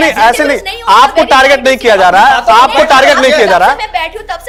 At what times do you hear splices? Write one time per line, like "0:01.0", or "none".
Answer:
none